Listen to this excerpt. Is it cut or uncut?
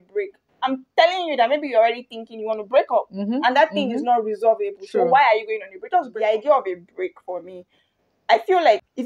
cut